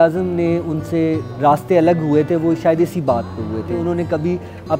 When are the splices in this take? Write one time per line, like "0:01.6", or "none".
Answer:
0:01.3
0:03.7